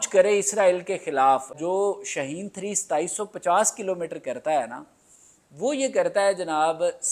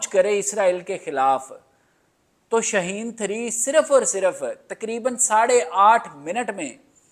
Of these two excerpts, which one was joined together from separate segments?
first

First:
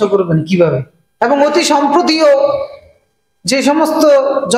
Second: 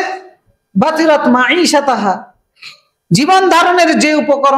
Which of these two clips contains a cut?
first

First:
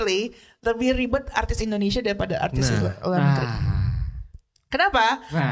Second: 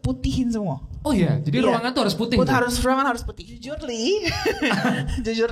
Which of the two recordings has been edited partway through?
second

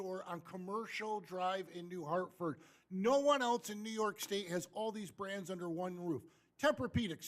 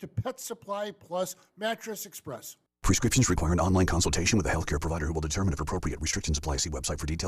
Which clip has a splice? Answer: second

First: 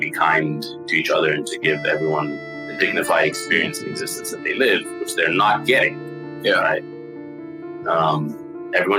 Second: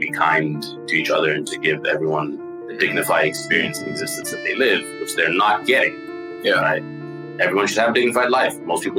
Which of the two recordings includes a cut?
second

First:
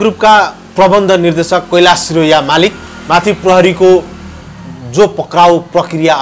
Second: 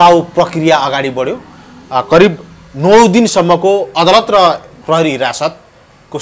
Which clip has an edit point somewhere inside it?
first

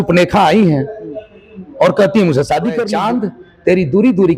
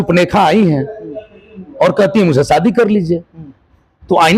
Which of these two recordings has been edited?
first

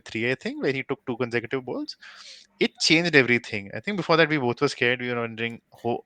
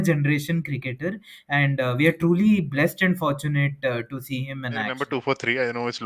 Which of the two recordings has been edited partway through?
second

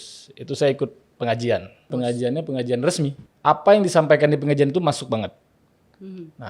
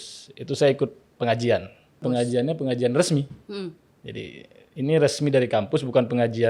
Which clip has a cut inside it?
first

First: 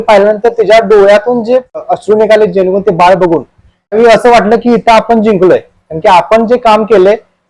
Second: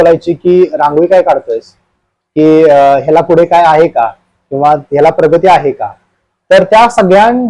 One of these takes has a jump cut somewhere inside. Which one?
first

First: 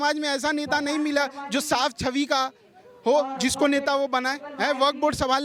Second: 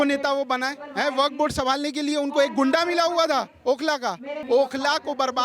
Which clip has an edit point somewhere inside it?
second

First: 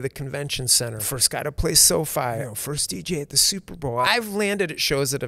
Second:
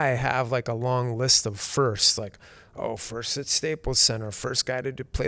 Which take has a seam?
first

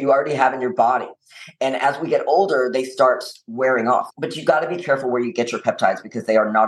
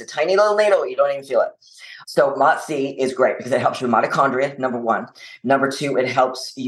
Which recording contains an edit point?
first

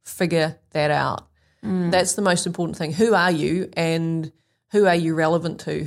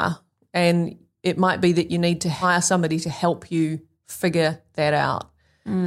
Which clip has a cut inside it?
second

